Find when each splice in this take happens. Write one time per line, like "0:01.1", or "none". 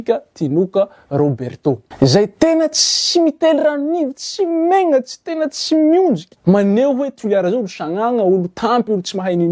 none

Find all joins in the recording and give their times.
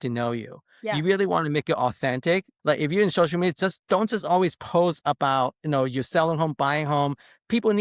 0:02.5

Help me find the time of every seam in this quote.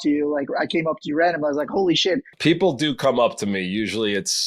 0:02.3

